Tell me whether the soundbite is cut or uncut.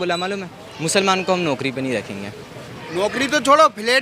cut